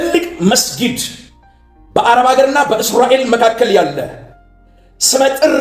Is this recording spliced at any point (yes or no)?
no